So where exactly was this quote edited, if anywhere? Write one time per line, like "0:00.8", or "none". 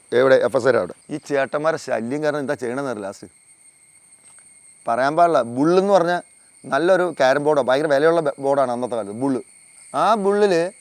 0:01.1